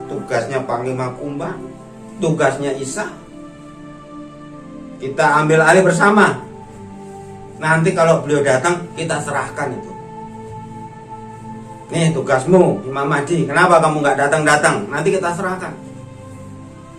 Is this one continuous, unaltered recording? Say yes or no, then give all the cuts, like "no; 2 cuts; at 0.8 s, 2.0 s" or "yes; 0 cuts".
no; 2 cuts; at 10.1 s, 11.7 s